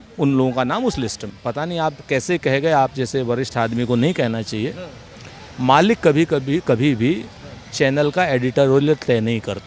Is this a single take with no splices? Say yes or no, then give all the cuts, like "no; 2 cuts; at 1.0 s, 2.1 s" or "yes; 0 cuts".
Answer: no; 1 cut; at 1.3 s